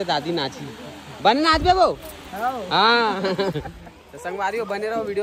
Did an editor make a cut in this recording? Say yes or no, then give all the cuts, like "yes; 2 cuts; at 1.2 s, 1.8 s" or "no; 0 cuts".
no; 0 cuts